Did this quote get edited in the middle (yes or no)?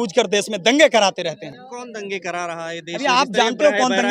no